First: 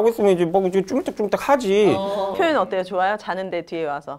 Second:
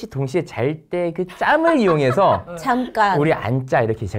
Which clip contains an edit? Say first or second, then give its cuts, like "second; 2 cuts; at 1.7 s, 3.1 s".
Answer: first; 1 cut; at 2.4 s